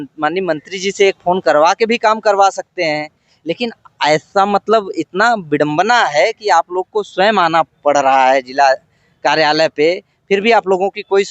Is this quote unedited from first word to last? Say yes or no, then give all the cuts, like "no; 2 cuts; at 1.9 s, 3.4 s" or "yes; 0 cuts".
yes; 0 cuts